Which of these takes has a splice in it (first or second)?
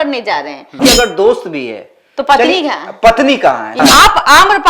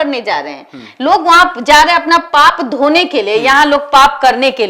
first